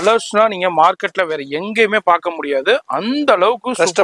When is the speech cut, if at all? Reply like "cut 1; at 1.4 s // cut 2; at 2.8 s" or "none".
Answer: none